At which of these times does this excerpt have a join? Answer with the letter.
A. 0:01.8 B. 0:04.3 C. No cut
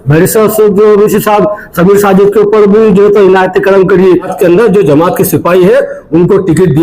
B